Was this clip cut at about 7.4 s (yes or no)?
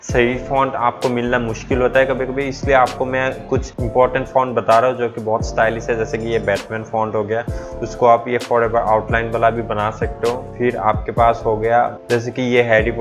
no